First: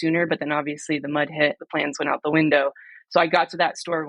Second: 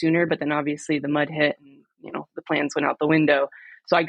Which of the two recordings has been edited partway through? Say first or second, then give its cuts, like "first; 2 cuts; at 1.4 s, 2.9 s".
first; 1 cut; at 1.6 s